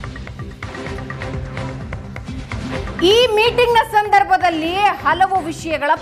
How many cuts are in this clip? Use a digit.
1